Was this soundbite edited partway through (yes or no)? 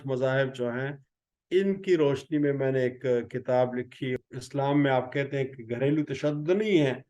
yes